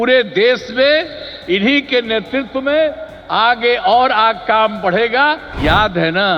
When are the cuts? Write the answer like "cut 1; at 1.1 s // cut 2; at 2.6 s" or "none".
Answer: cut 1; at 5.5 s